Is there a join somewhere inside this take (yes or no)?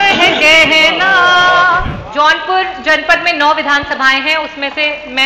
yes